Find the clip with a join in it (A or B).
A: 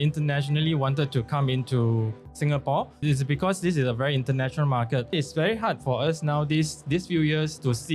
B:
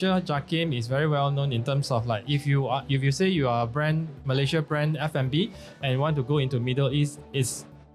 A